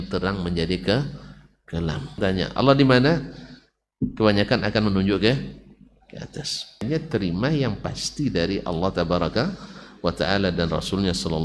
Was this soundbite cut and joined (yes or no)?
yes